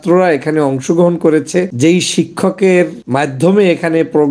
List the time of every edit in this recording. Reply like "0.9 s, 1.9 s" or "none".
1.7 s, 3.0 s